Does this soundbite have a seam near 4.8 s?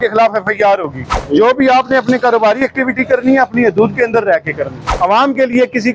yes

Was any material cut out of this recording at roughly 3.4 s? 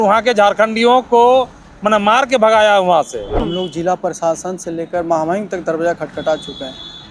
yes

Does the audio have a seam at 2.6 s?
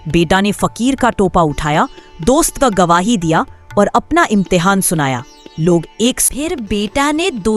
no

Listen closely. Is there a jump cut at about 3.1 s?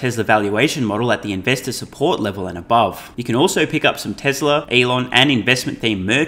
yes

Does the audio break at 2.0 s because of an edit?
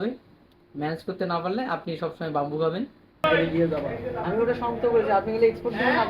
no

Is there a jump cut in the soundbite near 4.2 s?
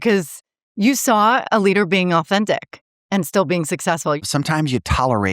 yes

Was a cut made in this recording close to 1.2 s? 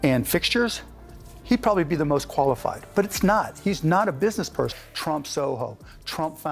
no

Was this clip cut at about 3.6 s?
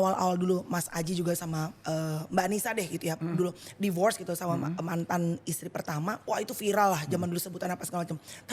no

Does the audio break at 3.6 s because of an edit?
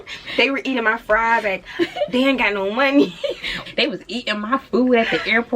yes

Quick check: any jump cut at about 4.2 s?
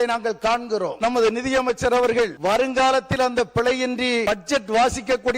yes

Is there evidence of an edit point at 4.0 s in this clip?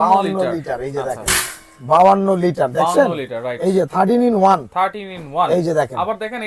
no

